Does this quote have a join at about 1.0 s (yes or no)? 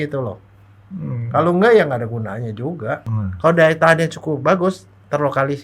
no